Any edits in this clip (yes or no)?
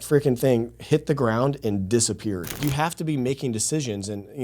yes